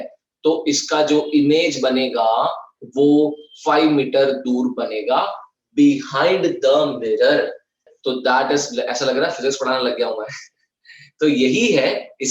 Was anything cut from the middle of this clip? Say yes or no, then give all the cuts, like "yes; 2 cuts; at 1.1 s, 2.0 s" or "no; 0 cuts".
yes; 1 cut; at 7.9 s